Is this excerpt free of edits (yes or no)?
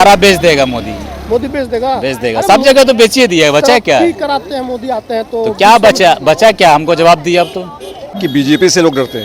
no